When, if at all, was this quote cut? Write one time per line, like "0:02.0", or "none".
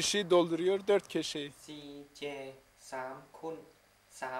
0:01.6

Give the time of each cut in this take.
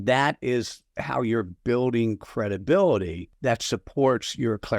0:03.2

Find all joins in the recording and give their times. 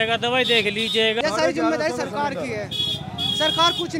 0:01.2

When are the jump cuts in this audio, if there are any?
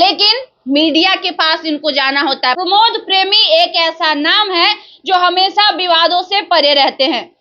0:02.6

